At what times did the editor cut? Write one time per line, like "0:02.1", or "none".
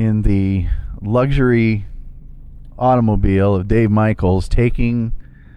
none